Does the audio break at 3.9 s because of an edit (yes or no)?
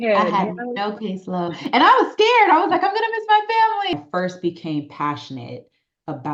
yes